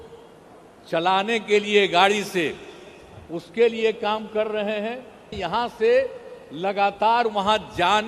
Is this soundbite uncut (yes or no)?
no